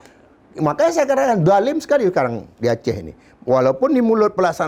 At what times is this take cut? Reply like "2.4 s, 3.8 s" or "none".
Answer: none